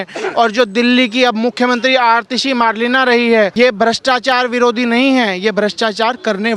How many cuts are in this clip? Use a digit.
1